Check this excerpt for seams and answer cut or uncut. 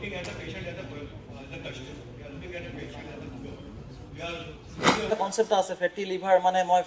cut